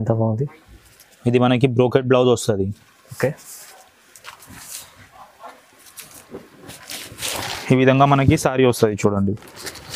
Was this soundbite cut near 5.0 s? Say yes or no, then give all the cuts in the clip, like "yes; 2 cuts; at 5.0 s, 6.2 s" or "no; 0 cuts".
no; 0 cuts